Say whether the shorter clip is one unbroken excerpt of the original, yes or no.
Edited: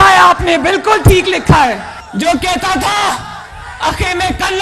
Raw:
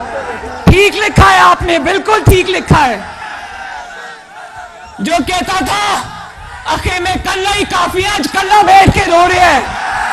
no